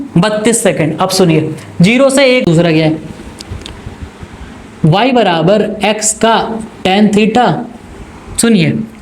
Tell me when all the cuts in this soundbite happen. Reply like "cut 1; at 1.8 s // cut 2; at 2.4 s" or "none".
cut 1; at 2.4 s